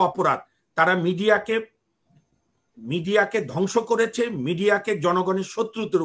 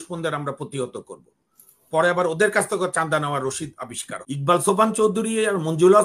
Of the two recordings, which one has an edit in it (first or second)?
second